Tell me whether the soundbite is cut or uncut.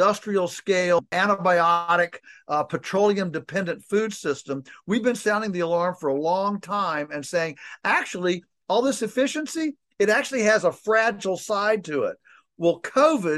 cut